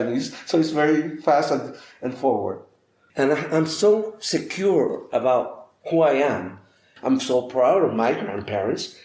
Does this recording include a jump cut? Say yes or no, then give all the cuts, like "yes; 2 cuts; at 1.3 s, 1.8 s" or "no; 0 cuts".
yes; 1 cut; at 6.9 s